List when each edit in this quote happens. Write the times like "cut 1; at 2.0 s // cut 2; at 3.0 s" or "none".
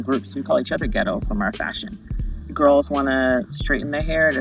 none